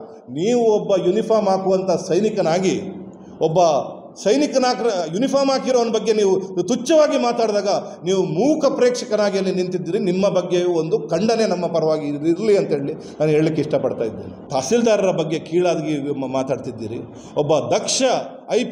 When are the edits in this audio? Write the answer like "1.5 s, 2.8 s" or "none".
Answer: 14.3 s